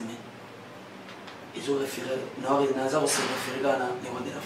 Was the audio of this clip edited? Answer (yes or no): no